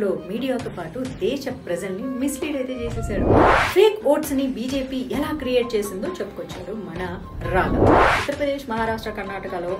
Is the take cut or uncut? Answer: cut